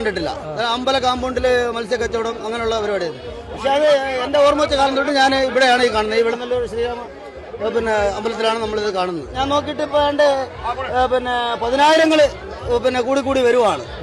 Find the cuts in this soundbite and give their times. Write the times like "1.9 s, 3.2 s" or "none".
none